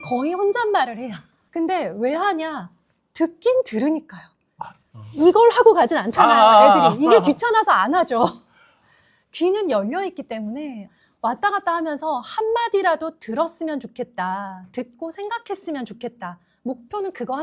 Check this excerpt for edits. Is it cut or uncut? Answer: uncut